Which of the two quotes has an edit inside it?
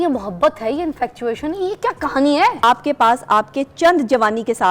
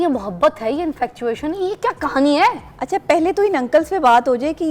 first; 1 cut; at 2.6 s

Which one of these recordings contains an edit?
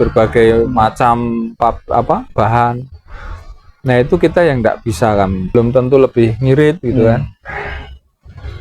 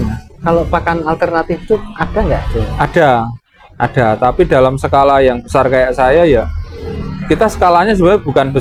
first; 1 cut; at 5.5 s

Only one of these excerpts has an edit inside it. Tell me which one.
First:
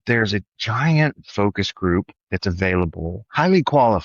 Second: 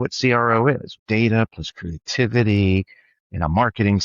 second; 1 cut; at 0.9 s

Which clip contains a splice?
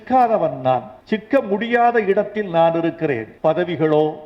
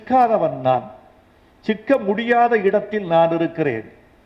first; 2 cuts; at 0.9 s, 3.3 s

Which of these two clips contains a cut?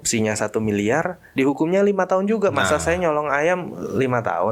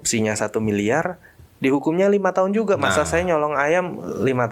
first; 1 cut; at 1.2 s

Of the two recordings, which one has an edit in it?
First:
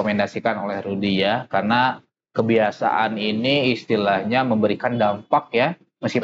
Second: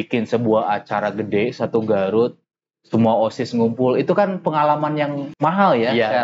second; 1 cut; at 5.3 s

